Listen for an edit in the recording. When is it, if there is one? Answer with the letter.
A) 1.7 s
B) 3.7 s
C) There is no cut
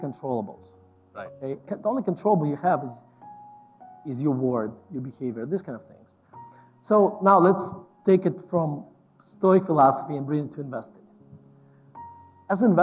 A